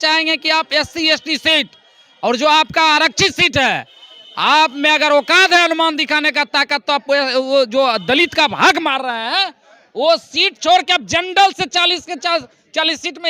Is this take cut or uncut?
uncut